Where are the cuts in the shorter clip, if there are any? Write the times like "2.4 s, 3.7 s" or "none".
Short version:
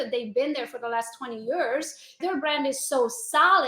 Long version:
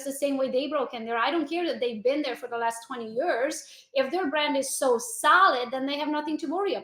2.2 s